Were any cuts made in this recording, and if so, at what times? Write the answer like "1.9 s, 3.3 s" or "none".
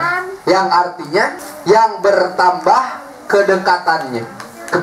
1.5 s